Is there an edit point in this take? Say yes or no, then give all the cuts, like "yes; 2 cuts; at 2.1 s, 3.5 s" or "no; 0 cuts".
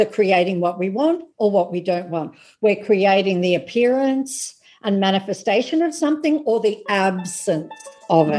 no; 0 cuts